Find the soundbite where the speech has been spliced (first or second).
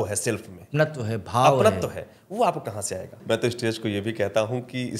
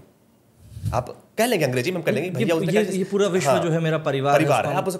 first